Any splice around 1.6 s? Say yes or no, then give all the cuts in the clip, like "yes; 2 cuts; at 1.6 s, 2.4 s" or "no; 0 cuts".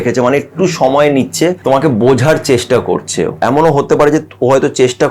yes; 2 cuts; at 1.6 s, 3.4 s